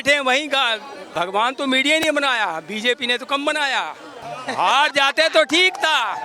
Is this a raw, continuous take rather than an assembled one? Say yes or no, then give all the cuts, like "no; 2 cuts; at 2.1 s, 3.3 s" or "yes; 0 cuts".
no; 2 cuts; at 1.0 s, 4.3 s